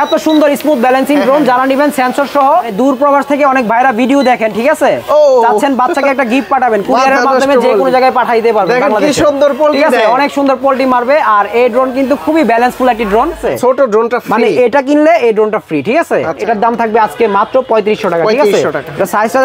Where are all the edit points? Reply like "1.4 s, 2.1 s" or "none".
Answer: 2.7 s, 13.4 s, 16.4 s

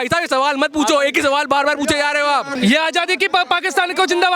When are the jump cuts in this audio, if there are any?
2.5 s

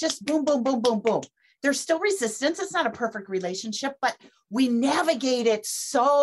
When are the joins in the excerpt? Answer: 1.4 s

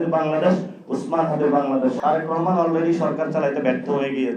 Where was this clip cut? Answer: 2.0 s

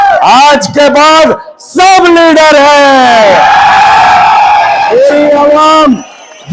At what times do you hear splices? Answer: none

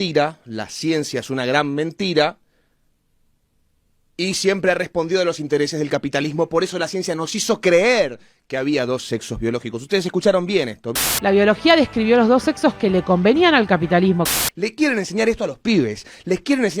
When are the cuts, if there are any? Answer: 11.0 s, 14.2 s

